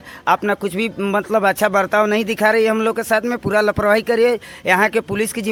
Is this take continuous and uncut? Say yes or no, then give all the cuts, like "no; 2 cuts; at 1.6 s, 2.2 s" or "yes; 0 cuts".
yes; 0 cuts